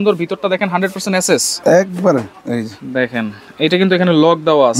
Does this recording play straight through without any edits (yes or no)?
yes